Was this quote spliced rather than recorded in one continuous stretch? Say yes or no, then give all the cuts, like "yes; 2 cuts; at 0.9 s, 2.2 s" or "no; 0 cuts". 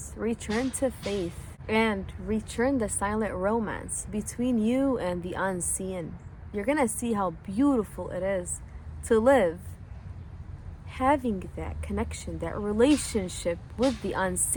no; 0 cuts